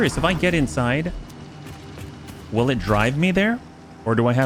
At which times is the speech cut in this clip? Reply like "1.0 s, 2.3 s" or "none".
none